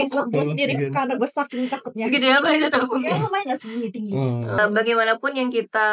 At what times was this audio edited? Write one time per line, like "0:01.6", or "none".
0:04.6